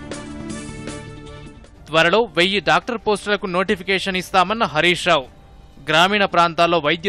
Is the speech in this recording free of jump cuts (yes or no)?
no